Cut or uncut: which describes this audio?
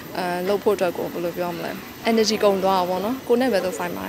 cut